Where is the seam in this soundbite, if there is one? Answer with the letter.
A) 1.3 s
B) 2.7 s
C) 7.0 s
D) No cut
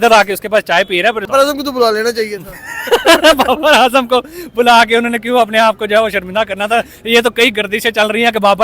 A